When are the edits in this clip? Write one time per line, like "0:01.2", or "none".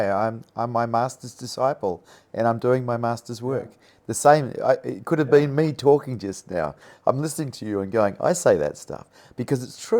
none